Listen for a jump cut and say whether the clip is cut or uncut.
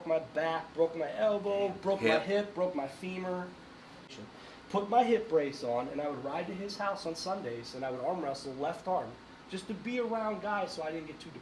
cut